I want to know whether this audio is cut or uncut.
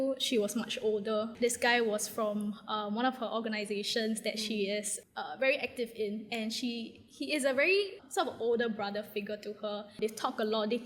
cut